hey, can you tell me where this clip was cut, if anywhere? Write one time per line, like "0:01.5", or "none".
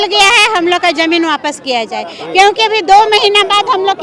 none